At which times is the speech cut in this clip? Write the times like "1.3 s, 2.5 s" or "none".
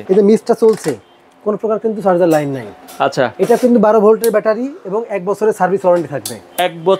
none